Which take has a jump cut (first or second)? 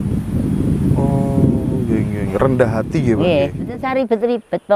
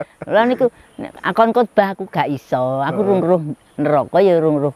first